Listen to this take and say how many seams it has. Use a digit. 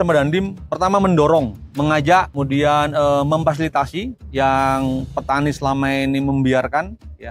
3